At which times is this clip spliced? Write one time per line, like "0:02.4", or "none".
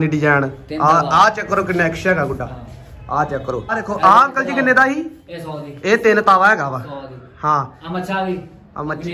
0:03.8